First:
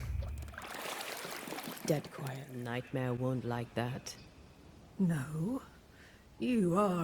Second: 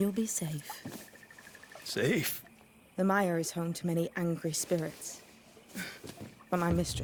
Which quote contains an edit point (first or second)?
first